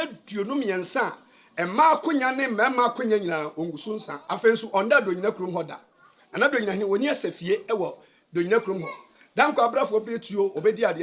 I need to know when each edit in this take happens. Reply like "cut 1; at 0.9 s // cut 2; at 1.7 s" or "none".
cut 1; at 4.1 s